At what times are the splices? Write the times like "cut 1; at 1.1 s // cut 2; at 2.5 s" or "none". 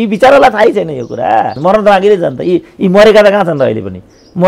cut 1; at 1.5 s